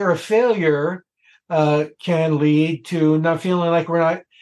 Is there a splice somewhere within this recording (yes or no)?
no